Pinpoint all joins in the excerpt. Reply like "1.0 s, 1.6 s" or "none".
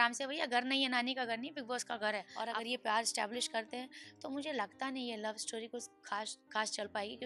2.3 s